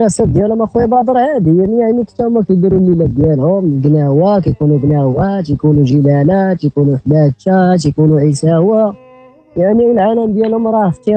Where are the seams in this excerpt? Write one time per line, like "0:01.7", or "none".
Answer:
none

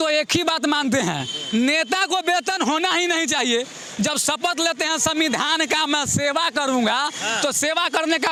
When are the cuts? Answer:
none

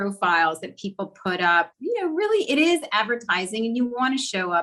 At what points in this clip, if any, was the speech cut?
none

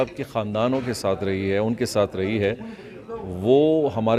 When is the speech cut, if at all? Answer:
none

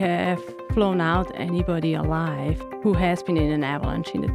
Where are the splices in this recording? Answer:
0:02.7

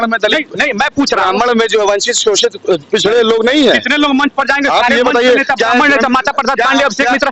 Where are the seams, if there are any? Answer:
none

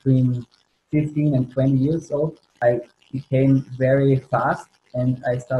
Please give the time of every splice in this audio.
0:02.4

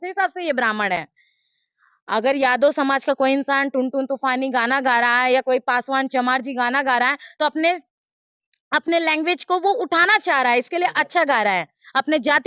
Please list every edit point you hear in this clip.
none

